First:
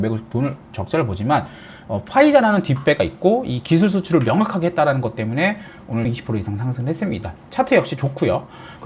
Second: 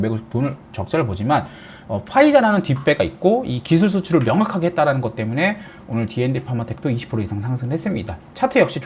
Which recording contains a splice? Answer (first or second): first